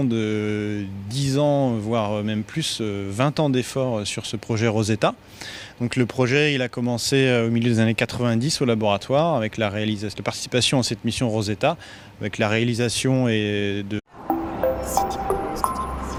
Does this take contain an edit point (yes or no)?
no